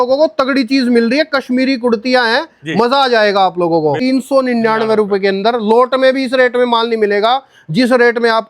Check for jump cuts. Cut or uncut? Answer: cut